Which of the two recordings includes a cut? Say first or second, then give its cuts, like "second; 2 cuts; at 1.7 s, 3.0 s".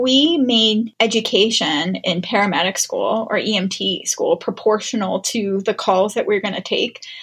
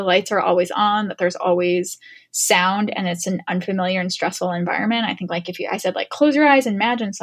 first; 1 cut; at 0.9 s